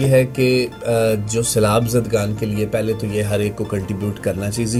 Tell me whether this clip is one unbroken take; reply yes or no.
yes